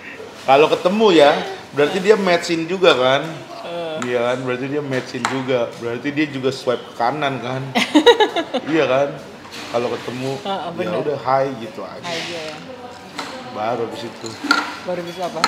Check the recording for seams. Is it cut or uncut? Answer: uncut